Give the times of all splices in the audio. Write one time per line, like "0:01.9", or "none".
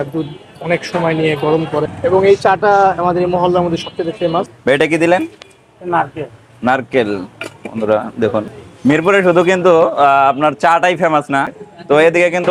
0:01.8
0:04.5
0:08.6
0:11.6